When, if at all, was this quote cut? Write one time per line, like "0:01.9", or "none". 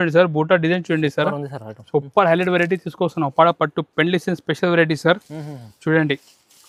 none